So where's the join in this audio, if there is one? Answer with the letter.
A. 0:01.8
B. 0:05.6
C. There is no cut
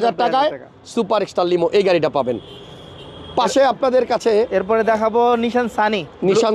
C